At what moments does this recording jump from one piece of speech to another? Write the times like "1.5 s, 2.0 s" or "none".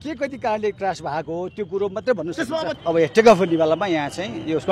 2.8 s

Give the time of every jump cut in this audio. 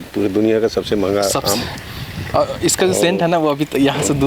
none

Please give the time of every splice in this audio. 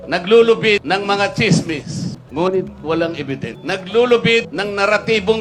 0.8 s, 2.2 s, 3.5 s, 4.5 s

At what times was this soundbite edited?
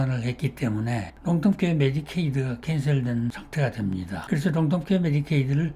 1.1 s, 3.7 s

